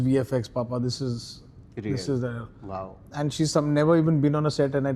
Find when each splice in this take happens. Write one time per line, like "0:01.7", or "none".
none